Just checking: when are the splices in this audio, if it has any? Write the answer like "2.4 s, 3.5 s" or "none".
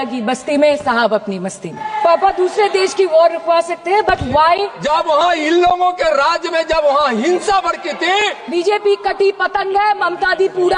1.9 s, 4.7 s, 8.4 s